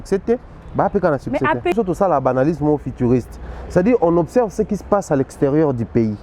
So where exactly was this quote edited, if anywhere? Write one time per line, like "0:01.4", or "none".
0:01.7